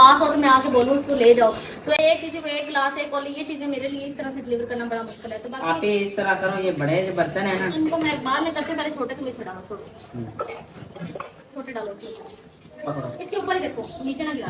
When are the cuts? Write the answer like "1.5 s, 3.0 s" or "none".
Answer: none

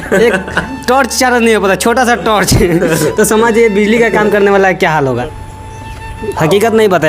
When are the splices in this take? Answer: 5.2 s

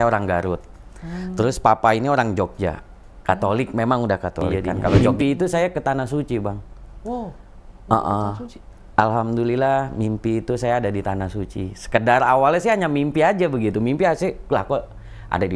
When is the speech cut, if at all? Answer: 5.0 s

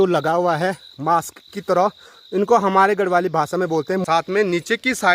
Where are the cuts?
4.0 s

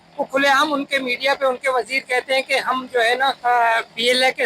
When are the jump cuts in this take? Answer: 3.4 s

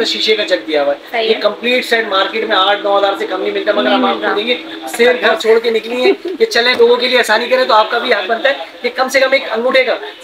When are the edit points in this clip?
5.3 s

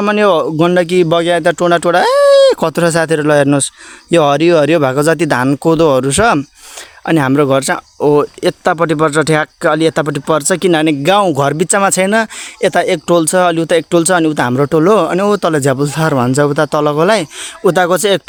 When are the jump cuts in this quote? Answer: none

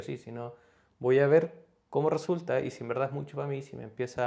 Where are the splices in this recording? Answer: none

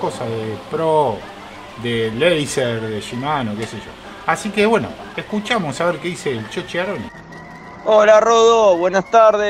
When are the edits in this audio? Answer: none

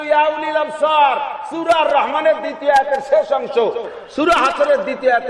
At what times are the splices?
3.8 s

